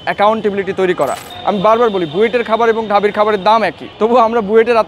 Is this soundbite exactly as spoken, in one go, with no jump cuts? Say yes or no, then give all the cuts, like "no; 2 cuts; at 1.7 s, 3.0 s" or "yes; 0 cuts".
no; 2 cuts; at 1.3 s, 3.8 s